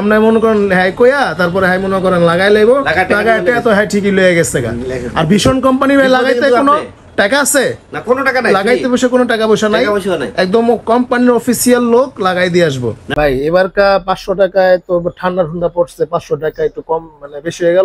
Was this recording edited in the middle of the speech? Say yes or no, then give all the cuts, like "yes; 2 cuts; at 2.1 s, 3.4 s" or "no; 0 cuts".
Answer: yes; 1 cut; at 13.0 s